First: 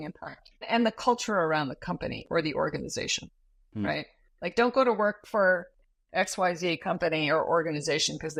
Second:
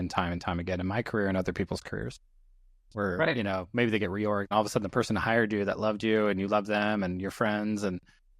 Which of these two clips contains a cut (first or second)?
second